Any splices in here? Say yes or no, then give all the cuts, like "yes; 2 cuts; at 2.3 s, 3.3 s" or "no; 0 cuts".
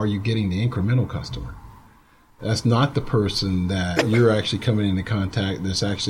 yes; 1 cut; at 4.0 s